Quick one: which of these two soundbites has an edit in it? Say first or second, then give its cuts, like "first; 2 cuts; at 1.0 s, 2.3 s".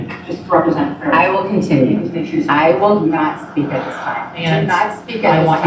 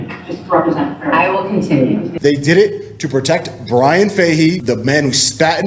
second; 2 cuts; at 2.1 s, 4.6 s